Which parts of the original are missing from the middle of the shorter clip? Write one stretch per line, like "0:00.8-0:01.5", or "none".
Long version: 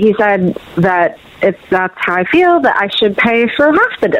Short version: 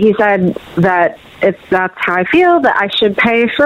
none